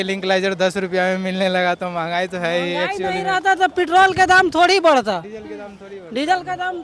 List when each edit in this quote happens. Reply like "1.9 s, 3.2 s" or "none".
none